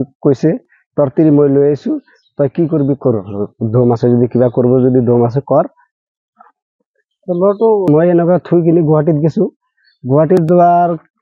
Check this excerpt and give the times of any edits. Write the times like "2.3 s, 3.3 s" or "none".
7.9 s